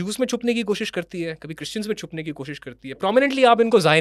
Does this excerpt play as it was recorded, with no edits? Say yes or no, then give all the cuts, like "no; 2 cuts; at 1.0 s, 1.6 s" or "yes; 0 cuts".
yes; 0 cuts